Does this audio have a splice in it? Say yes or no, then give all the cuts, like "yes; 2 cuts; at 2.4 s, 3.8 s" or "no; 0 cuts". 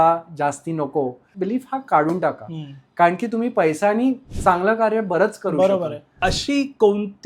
yes; 2 cuts; at 1.3 s, 6.0 s